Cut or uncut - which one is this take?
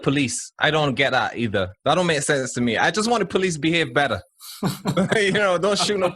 cut